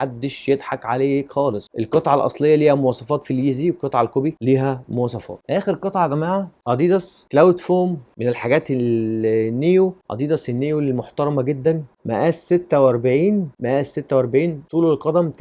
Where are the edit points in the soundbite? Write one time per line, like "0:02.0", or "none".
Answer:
none